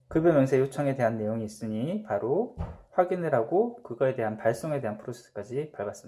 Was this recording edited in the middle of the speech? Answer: no; 0 cuts

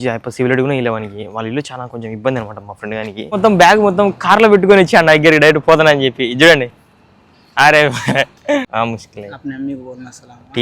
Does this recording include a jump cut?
yes; 2 cuts; at 3.3 s, 8.7 s

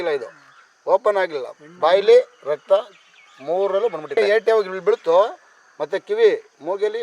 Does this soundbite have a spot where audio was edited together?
yes; 1 cut; at 4.2 s

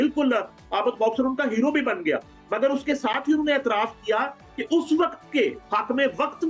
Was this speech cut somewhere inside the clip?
no; 0 cuts

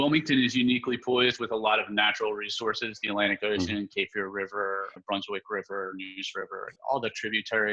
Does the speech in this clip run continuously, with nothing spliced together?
no; 2 cuts; at 5.0 s, 6.8 s

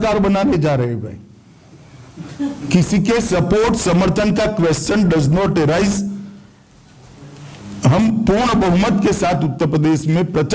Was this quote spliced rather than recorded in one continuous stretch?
no; 0 cuts

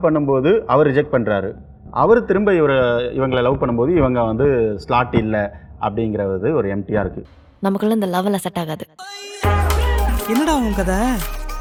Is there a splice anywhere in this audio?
no; 0 cuts

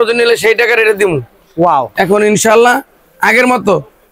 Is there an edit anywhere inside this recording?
yes; 1 cut; at 1.9 s

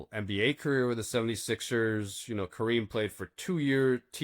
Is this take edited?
no; 0 cuts

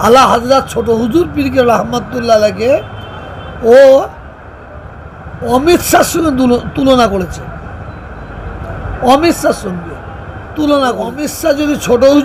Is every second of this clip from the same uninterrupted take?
no; 1 cut; at 11.2 s

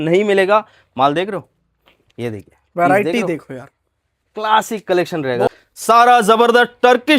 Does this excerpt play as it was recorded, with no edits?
no; 1 cut; at 5.5 s

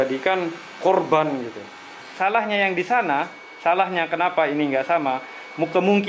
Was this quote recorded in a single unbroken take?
no; 1 cut; at 2.1 s

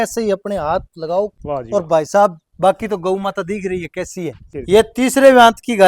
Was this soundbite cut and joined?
yes; 2 cuts; at 1.3 s, 4.4 s

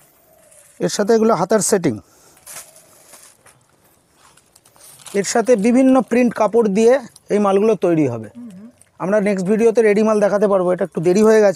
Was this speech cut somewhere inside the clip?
no; 0 cuts

